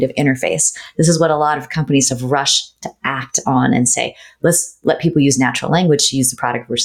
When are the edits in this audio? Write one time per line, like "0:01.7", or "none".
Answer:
none